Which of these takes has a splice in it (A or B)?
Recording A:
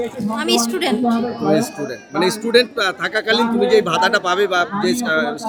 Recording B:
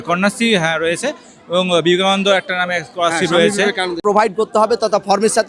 B